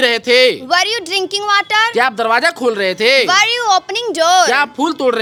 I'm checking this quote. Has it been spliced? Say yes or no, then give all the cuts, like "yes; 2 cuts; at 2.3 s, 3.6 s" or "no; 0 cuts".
no; 0 cuts